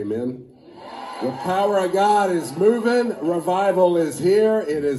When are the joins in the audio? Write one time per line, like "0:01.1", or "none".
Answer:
0:01.1